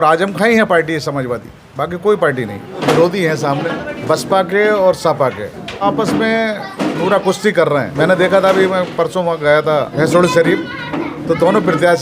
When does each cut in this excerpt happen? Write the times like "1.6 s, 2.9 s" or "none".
2.8 s, 3.9 s, 5.8 s, 7.9 s, 9.9 s, 11.1 s